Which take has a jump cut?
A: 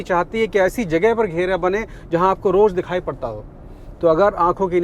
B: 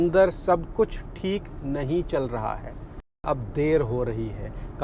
B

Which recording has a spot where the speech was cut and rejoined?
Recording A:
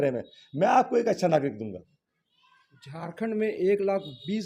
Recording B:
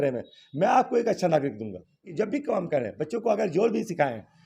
B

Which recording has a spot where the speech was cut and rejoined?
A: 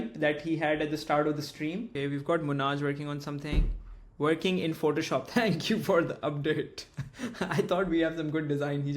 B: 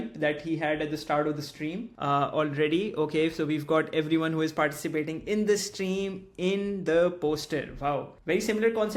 A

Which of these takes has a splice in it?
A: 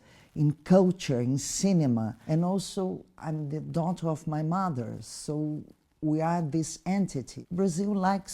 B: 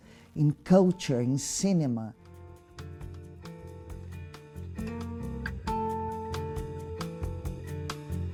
A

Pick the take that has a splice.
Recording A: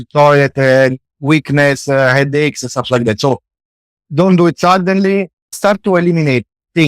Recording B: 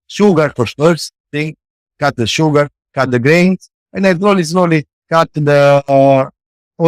A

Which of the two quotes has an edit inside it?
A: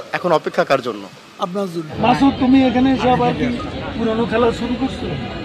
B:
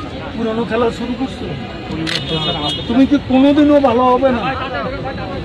A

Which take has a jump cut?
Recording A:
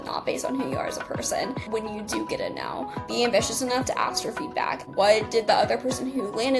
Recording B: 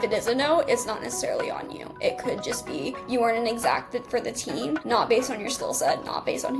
A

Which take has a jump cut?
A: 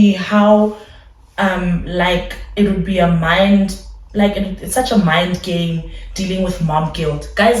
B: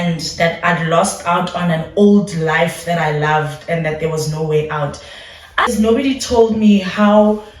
B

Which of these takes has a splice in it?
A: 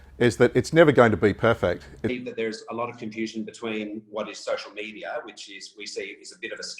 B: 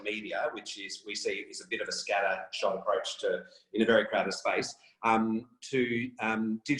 A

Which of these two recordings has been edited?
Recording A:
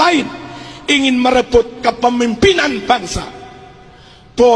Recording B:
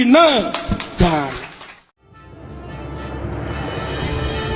B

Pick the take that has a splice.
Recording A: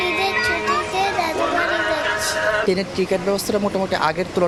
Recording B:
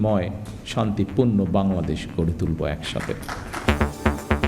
B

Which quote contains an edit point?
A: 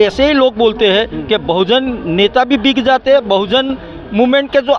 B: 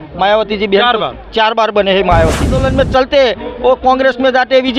B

